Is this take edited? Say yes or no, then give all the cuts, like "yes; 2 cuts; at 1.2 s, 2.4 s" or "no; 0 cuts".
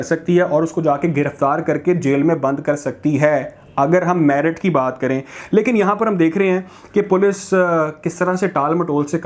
no; 0 cuts